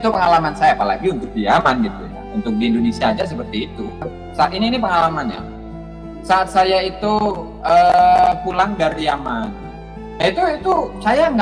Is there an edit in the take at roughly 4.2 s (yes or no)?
yes